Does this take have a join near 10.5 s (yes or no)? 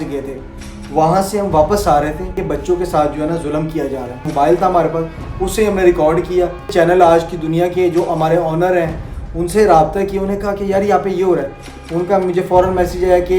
no